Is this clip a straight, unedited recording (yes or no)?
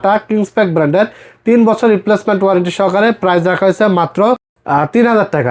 no